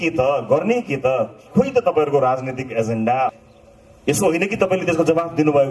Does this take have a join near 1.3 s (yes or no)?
no